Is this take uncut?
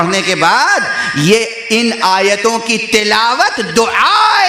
yes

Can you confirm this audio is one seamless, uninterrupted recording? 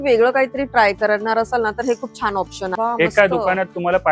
no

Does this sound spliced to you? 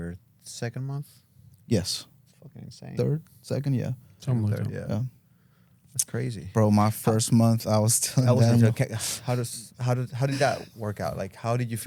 no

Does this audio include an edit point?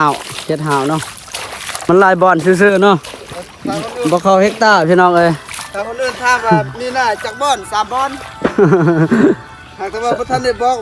yes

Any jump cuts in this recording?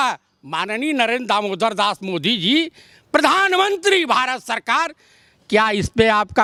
no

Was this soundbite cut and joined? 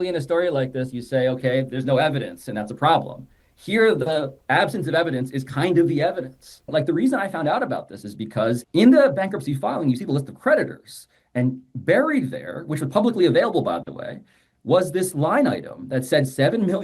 yes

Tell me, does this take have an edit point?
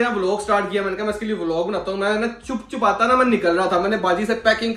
no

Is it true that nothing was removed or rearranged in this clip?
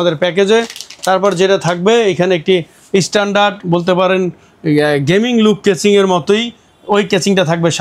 yes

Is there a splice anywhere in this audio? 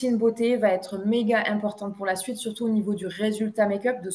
no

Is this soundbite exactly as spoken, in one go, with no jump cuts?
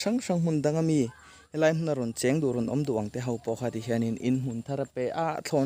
yes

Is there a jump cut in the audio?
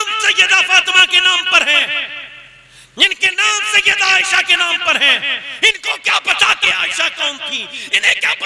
no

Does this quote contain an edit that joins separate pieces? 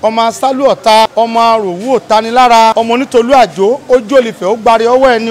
yes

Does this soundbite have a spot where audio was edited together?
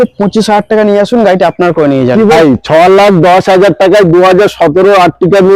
yes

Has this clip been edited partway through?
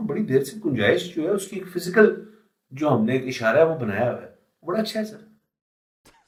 no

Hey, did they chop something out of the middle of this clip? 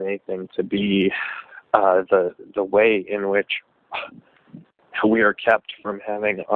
no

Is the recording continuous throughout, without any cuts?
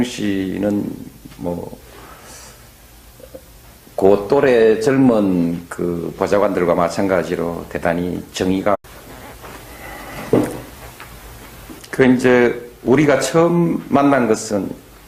yes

